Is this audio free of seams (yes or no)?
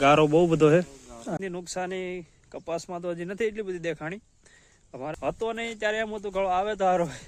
no